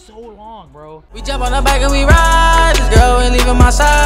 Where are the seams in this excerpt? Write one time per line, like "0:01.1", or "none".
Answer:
0:01.1